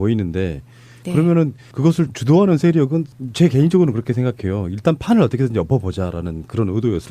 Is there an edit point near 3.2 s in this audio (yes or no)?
no